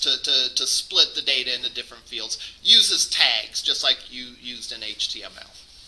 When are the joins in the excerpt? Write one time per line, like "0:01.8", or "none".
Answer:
0:03.4